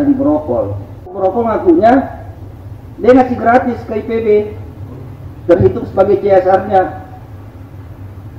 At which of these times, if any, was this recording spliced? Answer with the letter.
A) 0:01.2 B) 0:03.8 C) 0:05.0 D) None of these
A